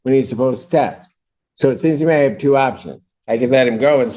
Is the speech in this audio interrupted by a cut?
no; 0 cuts

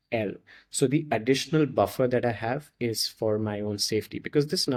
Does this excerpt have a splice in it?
no; 0 cuts

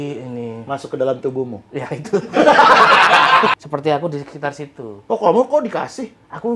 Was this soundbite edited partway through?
yes; 1 cut; at 3.6 s

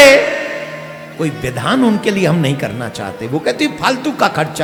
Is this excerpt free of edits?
yes; 0 cuts

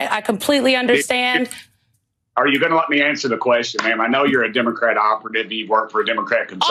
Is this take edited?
no; 0 cuts

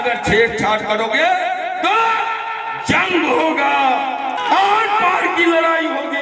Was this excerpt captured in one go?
no; 1 cut; at 4.4 s

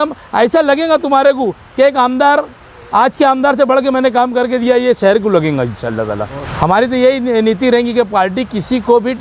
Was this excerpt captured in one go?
no; 1 cut; at 6.4 s

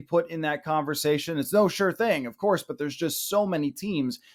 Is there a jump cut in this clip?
no; 0 cuts

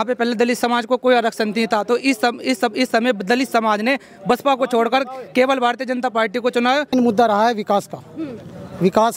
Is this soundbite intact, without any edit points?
no; 1 cut; at 6.9 s

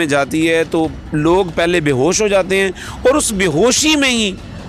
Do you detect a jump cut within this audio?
no; 0 cuts

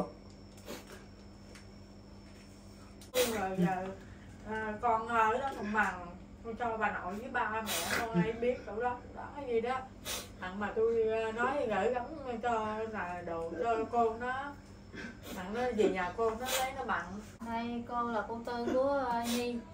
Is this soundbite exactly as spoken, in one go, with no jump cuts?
no; 2 cuts; at 3.1 s, 17.3 s

